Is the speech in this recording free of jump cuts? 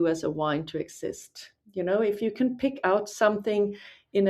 yes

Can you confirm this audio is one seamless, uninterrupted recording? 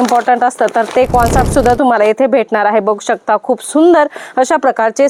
yes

